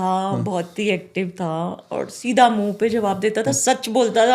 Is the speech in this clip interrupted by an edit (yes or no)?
no